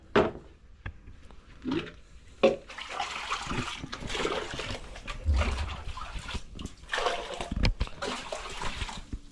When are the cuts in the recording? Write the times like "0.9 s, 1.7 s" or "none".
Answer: none